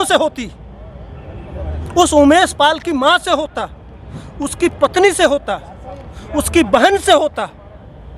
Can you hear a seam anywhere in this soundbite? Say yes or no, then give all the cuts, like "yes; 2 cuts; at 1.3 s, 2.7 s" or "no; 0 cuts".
no; 0 cuts